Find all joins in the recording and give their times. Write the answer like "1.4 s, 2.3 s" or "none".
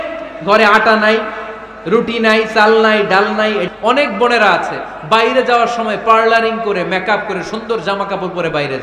3.7 s